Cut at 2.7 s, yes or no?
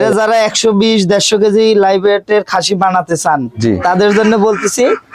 no